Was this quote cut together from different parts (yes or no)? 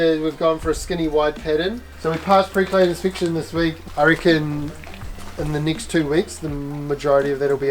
yes